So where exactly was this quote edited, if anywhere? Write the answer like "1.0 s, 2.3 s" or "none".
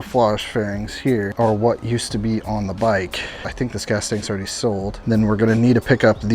1.3 s, 3.5 s, 4.9 s